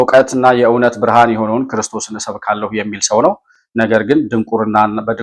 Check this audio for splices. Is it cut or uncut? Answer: uncut